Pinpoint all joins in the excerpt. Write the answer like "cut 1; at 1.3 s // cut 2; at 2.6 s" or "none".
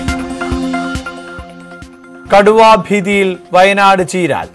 cut 1; at 1.4 s